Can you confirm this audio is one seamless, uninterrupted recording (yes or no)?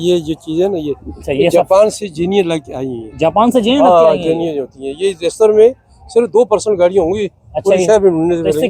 yes